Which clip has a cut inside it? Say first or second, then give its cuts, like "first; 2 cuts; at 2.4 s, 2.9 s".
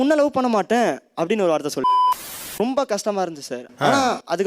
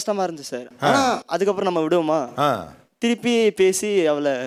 first; 1 cut; at 2.0 s